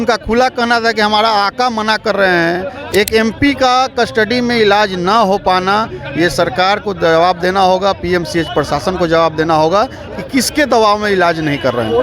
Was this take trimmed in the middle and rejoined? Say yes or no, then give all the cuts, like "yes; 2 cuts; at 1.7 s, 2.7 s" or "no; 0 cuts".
yes; 1 cut; at 2.8 s